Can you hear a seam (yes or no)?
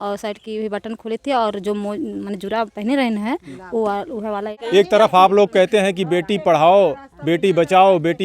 yes